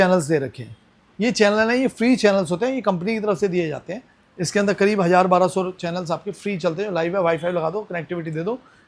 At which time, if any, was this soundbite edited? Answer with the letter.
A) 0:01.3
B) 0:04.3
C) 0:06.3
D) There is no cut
D